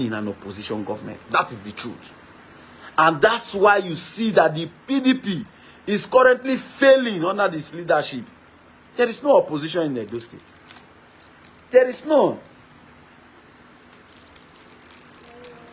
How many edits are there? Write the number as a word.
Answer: zero